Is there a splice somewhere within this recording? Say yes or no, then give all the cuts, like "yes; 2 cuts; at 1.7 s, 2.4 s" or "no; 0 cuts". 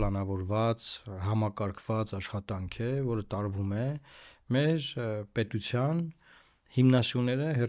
no; 0 cuts